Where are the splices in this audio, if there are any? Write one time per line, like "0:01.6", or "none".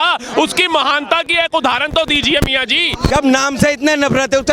0:03.1